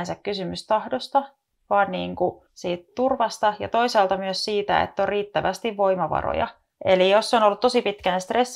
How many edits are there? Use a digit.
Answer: 2